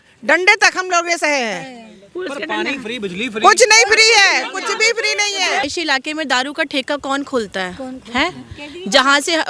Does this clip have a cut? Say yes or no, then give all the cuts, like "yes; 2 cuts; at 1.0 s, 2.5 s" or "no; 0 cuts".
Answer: yes; 1 cut; at 5.6 s